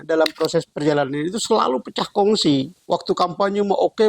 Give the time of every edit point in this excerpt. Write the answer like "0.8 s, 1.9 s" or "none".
2.8 s